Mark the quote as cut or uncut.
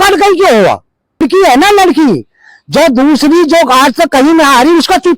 cut